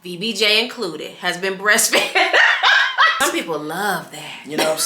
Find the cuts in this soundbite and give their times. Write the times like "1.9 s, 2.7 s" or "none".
3.1 s